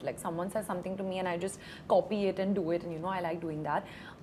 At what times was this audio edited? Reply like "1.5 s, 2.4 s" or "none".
none

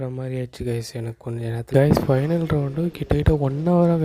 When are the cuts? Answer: 1.6 s

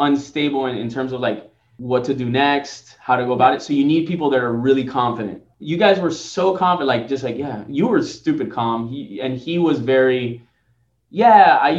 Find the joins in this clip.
none

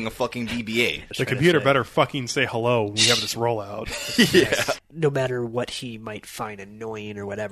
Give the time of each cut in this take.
1.0 s, 4.8 s

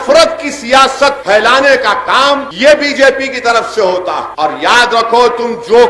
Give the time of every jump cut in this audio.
4.3 s

